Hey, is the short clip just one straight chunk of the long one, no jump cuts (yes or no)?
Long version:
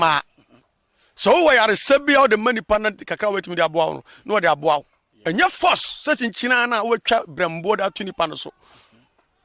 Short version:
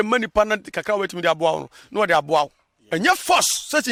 yes